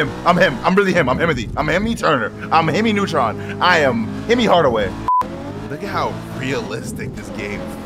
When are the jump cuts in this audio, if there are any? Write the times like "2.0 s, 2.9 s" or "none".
5.2 s

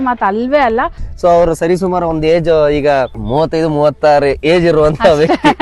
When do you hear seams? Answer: 1.0 s, 3.2 s

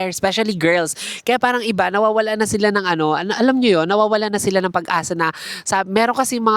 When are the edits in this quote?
none

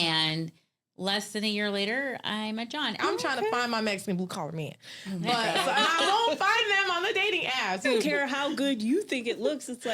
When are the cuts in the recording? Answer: 3.0 s, 7.8 s

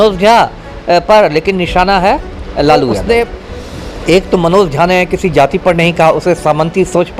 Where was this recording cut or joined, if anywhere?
3.0 s

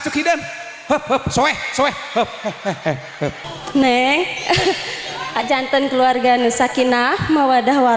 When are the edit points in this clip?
3.4 s

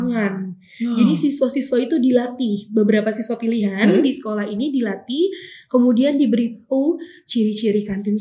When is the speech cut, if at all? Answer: none

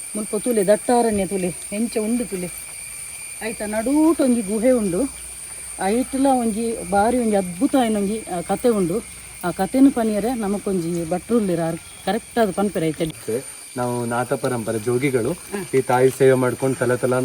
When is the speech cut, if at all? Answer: 13.1 s

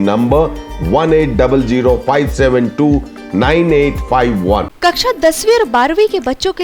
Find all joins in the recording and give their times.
4.7 s

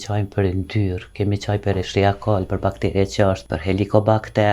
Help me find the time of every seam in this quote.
3.5 s

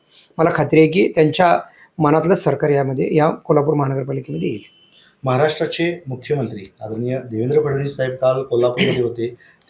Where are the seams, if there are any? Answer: none

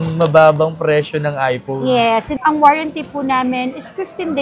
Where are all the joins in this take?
2.3 s

